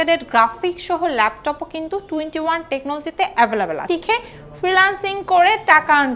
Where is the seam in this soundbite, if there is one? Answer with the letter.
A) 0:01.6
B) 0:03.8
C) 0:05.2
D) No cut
B